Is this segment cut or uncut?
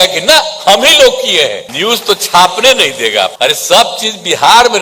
cut